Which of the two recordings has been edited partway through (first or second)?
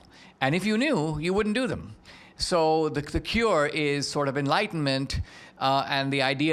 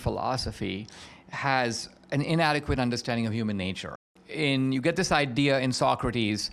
second